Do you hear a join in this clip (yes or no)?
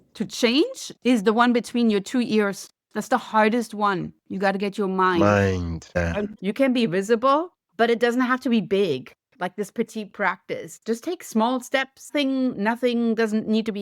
yes